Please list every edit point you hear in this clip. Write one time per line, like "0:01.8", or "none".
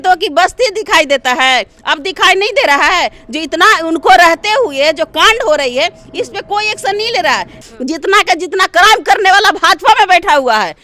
0:07.6